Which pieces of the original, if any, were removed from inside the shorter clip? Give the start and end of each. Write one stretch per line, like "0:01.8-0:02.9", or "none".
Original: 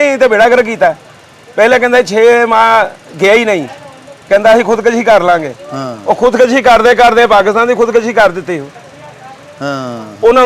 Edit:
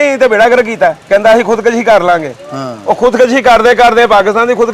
0:01.0-0:04.2